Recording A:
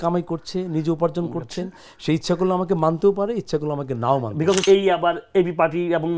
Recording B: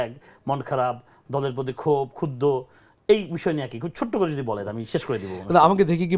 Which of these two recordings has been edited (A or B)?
A